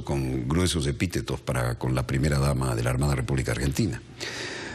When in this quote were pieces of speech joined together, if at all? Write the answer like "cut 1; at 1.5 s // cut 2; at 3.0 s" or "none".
cut 1; at 2.7 s